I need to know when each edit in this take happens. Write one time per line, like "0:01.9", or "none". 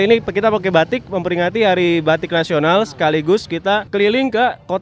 0:03.9